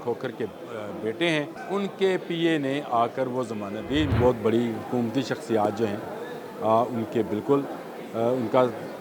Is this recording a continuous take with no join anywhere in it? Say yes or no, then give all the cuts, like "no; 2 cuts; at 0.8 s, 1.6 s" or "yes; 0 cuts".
no; 2 cuts; at 1.6 s, 4.1 s